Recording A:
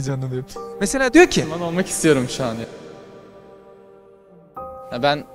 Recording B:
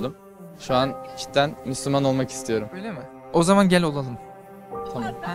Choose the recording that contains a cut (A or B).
A